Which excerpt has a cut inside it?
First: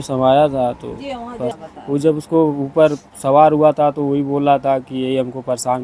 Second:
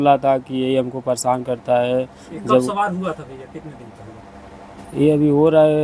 first; 1 cut; at 1.6 s

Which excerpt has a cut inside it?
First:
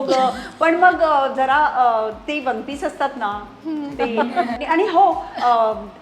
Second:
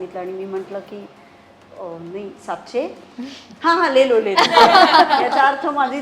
first; 1 cut; at 4.6 s

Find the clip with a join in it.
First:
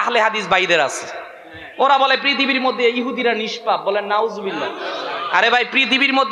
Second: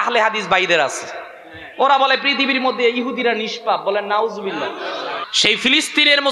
second; 1 cut; at 5.2 s

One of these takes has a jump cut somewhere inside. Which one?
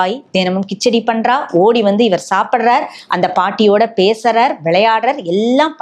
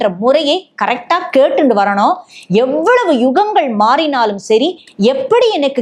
second; 1 cut; at 4.8 s

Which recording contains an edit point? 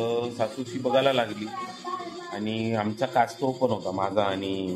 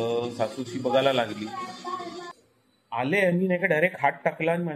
second; 1 cut; at 2.3 s

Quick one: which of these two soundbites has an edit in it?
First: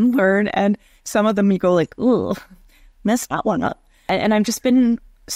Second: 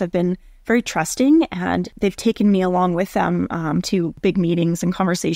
first; 1 cut; at 4.1 s

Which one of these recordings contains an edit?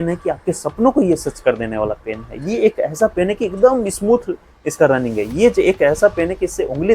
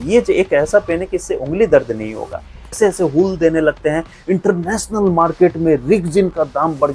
second; 1 cut; at 2.7 s

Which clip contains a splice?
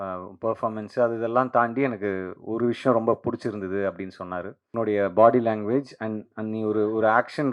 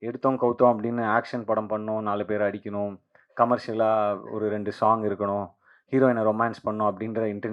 first; 1 cut; at 4.7 s

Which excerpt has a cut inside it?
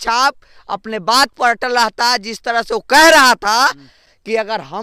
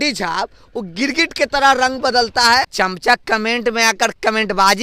second; 1 cut; at 2.7 s

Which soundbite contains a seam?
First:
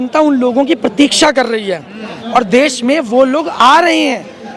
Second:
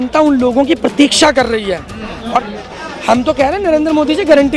second; 1 cut; at 2.4 s

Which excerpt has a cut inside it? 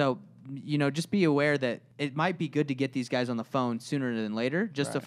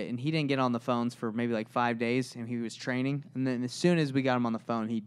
first; 1 cut; at 1.9 s

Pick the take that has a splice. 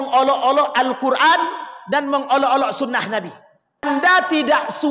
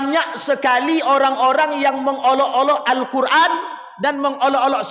first; 1 cut; at 3.8 s

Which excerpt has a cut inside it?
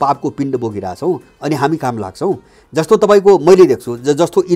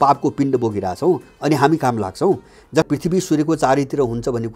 second; 1 cut; at 2.9 s

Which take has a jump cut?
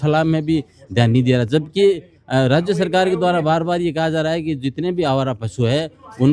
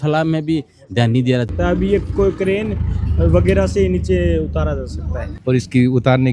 second; 2 cuts; at 1.5 s, 5.4 s

